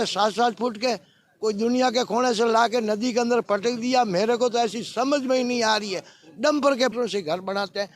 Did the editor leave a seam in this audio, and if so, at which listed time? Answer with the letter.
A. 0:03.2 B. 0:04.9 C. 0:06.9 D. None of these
C